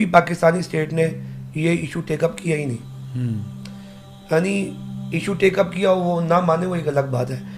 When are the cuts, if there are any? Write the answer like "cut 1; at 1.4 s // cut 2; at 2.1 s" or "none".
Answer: none